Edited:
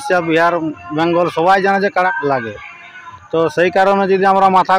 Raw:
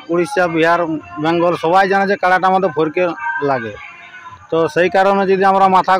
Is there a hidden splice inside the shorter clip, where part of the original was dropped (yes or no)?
yes